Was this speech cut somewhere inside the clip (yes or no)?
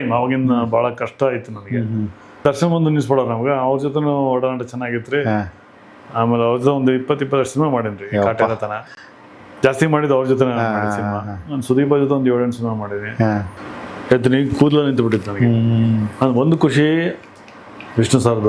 yes